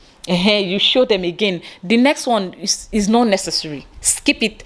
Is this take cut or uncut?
uncut